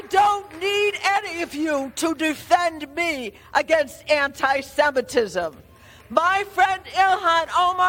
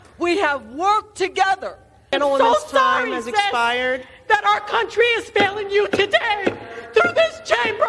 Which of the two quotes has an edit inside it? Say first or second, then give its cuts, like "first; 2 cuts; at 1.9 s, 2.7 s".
second; 1 cut; at 2.1 s